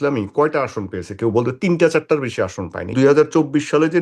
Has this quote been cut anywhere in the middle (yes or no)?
yes